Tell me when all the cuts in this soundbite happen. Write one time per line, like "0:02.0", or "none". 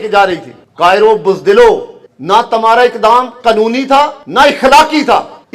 0:04.2